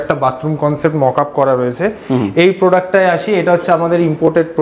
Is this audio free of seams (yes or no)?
yes